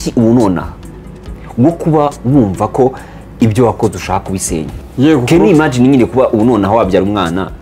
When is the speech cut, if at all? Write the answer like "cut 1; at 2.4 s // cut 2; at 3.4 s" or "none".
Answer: cut 1; at 4.8 s